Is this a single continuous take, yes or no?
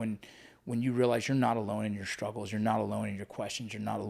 yes